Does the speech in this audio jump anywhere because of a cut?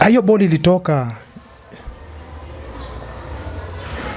no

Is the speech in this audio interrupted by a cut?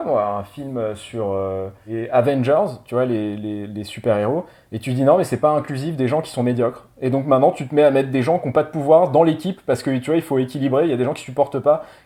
yes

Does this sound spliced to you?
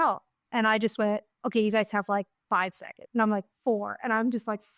no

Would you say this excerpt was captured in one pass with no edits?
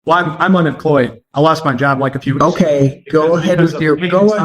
no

